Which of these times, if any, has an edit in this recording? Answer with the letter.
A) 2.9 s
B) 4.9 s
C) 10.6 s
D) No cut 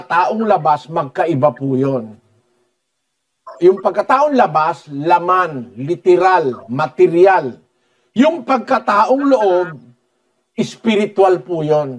D